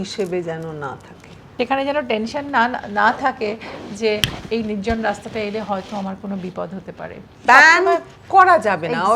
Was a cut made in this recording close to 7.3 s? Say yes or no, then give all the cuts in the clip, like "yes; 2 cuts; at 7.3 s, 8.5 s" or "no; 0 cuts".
yes; 2 cuts; at 1.4 s, 7.3 s